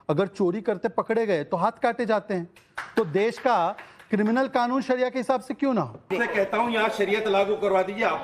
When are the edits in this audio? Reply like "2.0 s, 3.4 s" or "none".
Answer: 6.1 s